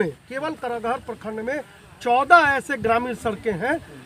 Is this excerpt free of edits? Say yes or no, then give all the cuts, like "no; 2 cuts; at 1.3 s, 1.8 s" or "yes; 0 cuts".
yes; 0 cuts